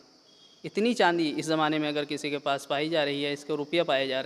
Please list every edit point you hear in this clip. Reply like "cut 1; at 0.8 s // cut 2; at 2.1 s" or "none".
none